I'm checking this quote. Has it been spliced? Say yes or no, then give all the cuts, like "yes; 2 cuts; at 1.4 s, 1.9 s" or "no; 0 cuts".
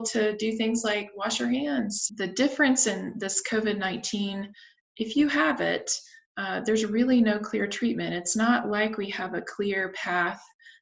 yes; 1 cut; at 2.0 s